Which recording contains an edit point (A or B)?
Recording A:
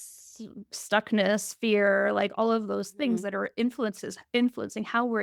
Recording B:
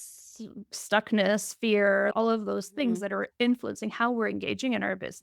B